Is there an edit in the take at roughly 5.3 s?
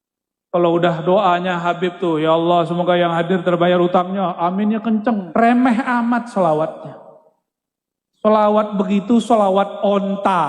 yes; 1 cut; at 5.3 s

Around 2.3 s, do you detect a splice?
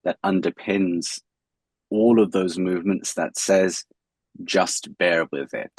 no; 0 cuts

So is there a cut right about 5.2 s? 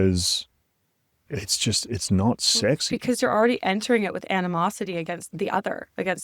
yes; 1 cut; at 5.2 s

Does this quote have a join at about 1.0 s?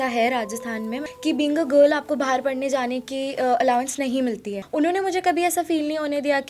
yes; 2 cuts; at 1.0 s, 4.6 s

